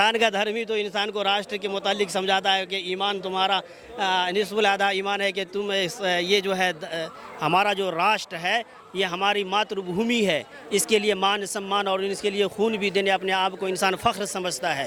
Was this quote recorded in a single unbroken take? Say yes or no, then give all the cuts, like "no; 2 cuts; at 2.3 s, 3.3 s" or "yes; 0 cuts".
yes; 0 cuts